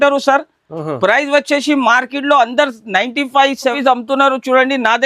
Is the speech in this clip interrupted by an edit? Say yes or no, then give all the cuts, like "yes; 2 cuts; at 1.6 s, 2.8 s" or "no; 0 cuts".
yes; 1 cut; at 3.7 s